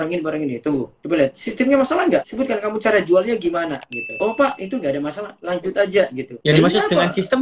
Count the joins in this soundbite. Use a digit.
0